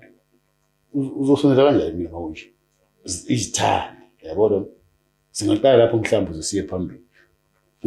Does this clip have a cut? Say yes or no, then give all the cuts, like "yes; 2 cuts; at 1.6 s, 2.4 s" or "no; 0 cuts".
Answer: no; 0 cuts